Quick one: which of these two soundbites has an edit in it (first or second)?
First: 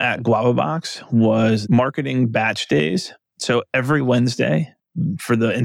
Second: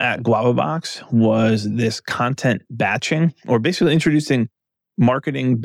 first